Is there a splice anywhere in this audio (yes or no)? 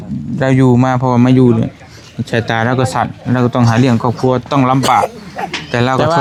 no